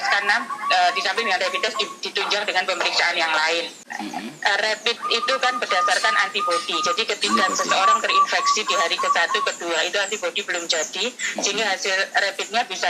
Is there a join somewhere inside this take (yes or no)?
yes